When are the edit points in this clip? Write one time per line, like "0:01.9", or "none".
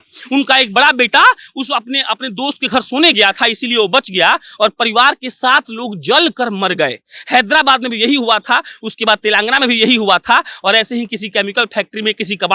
none